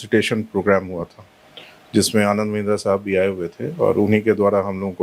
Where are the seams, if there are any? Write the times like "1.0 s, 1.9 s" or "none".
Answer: none